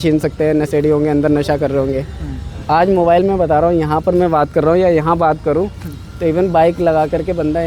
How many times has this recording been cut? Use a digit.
0